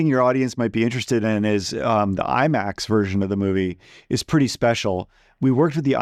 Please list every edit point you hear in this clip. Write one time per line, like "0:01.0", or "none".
none

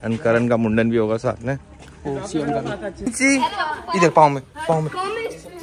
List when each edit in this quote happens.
none

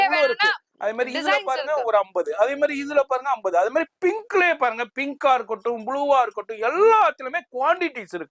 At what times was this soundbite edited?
none

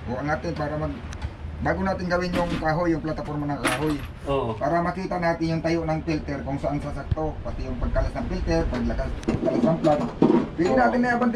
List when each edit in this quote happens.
none

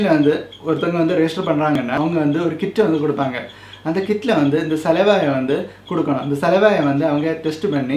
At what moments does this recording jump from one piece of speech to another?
0:01.7

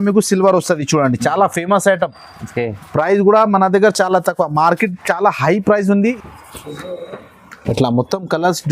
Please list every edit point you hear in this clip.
0:06.2

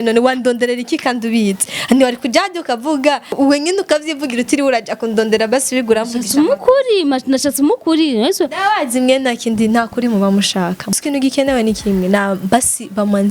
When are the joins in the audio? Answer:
0:03.4
0:10.9

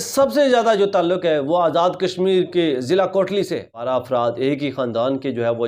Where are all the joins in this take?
0:03.7

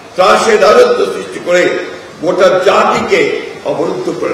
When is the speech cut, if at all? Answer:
none

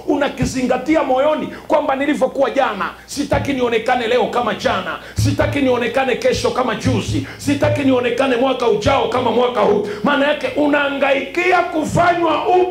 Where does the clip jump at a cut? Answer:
none

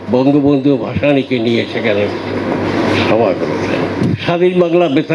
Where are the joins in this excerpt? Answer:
0:03.9

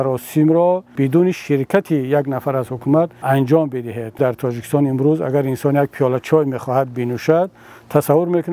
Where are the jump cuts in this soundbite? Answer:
0:00.9
0:03.2
0:04.2

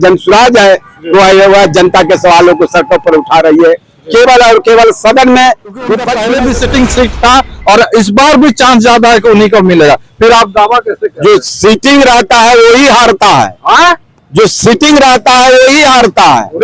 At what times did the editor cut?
0:06.1

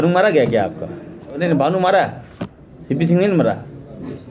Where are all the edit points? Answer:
0:01.4

